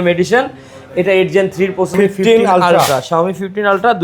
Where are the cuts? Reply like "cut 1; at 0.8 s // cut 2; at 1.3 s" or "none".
cut 1; at 1.9 s

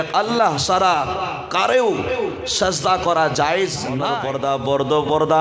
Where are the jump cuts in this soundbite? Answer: cut 1; at 4.1 s

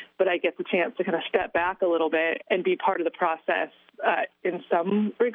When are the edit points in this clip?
cut 1; at 2.4 s

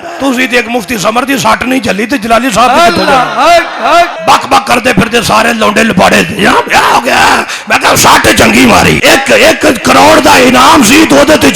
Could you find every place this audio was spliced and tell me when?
cut 1; at 4.2 s // cut 2; at 9.0 s

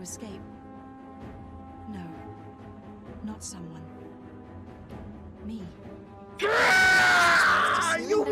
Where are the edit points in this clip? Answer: none

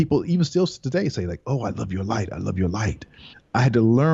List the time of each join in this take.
none

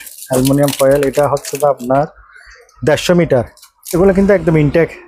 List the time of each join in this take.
cut 1; at 4.0 s

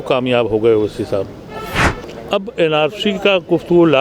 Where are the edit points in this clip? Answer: cut 1; at 1.9 s

